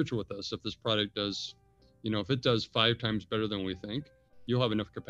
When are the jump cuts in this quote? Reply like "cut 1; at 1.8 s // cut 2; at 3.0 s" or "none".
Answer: none

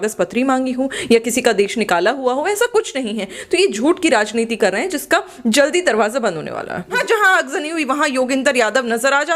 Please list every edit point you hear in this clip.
cut 1; at 7.0 s

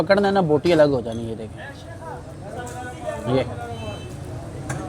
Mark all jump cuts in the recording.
none

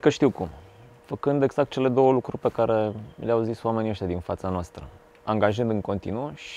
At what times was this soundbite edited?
none

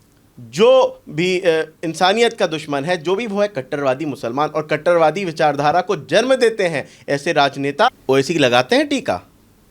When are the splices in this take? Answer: cut 1; at 7.9 s

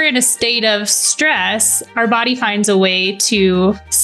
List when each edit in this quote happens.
none

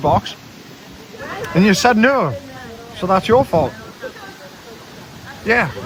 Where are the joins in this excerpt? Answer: none

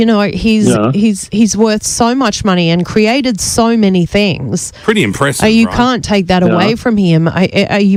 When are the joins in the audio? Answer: none

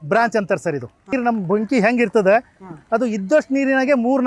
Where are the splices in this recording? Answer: cut 1; at 1.1 s

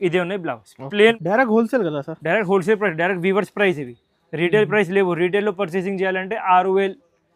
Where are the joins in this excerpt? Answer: cut 1; at 1.2 s

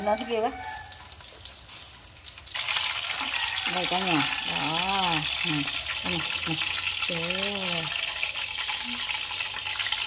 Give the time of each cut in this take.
cut 1; at 2.5 s

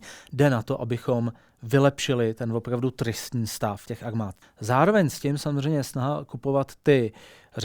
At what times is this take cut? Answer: cut 1; at 4.0 s

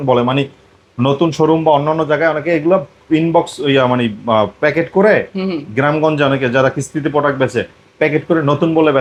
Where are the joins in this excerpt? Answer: none

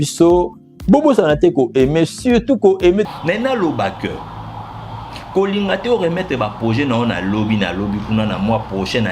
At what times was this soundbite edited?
cut 1; at 3.1 s

